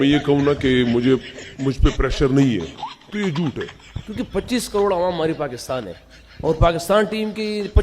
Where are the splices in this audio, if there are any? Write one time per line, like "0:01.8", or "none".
0:03.7